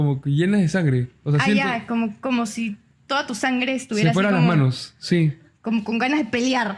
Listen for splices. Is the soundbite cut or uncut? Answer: uncut